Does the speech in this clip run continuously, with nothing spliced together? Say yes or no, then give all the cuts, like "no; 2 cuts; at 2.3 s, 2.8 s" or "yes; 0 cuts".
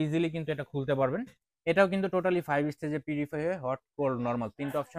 yes; 0 cuts